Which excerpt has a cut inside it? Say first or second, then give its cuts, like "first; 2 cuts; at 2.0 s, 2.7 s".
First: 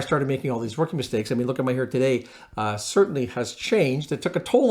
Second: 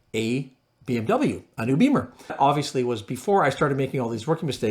second; 1 cut; at 2.3 s